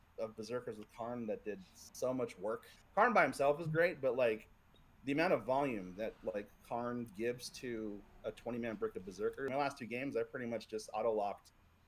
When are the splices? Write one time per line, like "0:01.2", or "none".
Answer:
0:02.7
0:09.5